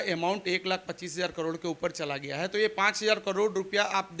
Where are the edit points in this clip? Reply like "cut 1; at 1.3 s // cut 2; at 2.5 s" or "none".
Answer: none